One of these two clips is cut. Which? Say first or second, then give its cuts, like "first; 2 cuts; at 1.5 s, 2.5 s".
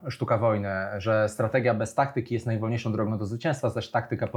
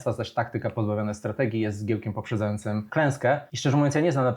second; 2 cuts; at 2.9 s, 3.5 s